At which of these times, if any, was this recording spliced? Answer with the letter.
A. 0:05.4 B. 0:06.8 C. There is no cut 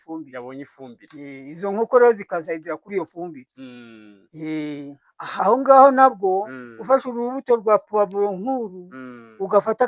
A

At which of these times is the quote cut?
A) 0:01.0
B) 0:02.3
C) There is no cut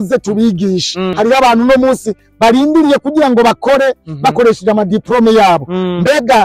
A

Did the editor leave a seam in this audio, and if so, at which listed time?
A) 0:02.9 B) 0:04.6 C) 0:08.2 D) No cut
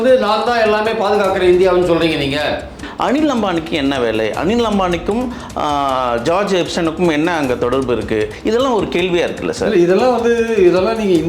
A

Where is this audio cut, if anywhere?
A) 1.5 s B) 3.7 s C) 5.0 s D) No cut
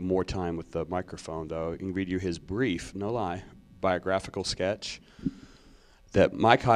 A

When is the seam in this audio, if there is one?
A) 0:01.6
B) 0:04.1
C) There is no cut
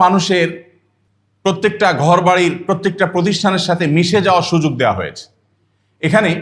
A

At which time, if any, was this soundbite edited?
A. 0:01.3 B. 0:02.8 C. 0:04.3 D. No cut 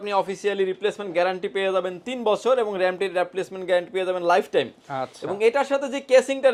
D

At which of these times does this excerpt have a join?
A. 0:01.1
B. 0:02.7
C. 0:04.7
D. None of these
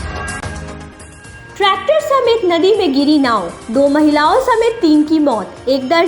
A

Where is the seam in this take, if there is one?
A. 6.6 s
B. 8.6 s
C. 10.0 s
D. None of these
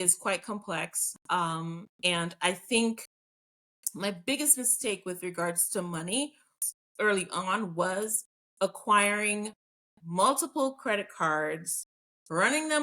A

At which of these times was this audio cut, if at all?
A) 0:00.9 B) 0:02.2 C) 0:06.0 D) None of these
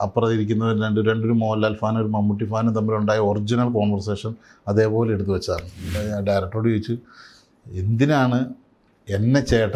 C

